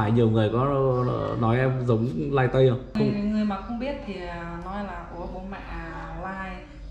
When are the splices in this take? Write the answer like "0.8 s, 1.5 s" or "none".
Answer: 3.0 s